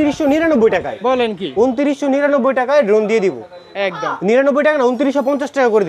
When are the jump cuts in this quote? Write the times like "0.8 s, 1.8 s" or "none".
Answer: none